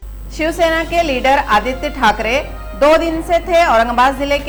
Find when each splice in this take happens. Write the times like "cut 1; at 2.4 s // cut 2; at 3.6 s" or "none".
none